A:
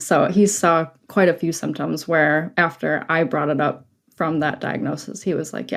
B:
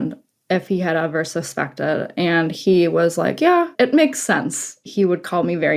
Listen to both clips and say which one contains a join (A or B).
B